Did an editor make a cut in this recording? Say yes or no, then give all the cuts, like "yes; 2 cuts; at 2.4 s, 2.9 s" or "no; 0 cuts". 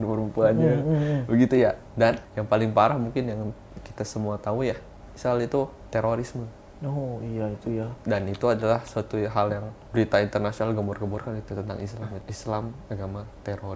yes; 4 cuts; at 2.3 s, 5.8 s, 9.7 s, 12.3 s